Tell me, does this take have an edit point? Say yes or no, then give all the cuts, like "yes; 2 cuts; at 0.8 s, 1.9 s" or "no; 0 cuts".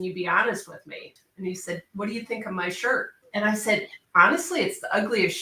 yes; 2 cuts; at 1.1 s, 3.2 s